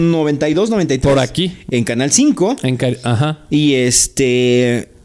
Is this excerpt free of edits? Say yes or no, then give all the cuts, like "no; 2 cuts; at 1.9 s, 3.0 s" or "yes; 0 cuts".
yes; 0 cuts